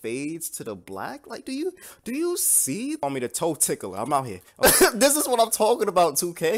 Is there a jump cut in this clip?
yes; 2 cuts; at 3.0 s, 4.4 s

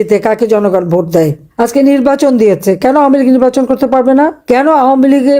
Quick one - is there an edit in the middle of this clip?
yes; 2 cuts; at 1.4 s, 4.4 s

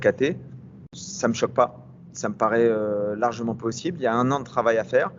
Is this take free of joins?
yes; 0 cuts

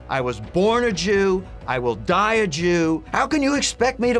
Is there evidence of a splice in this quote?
yes; 1 cut; at 3.1 s

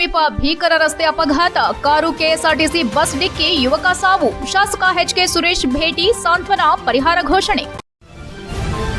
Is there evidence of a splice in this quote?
yes; 1 cut; at 7.7 s

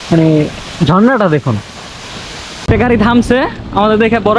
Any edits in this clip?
yes; 1 cut; at 2.7 s

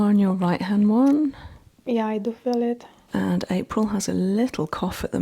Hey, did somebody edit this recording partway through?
yes; 1 cut; at 2.9 s

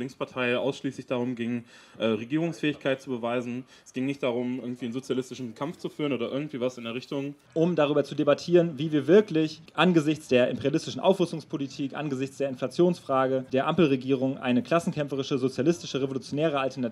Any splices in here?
yes; 3 cuts; at 7.4 s, 9.6 s, 13.5 s

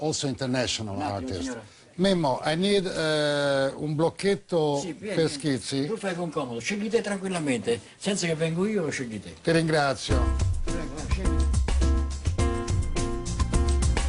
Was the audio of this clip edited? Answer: yes; 1 cut; at 11.8 s

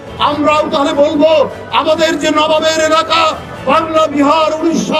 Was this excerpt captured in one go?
yes; 0 cuts

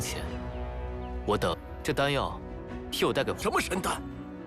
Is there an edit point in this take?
yes; 1 cut; at 3.4 s

